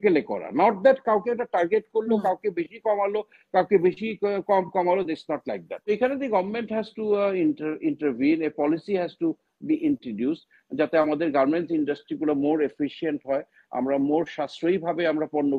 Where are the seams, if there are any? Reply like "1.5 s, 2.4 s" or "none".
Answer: 5.7 s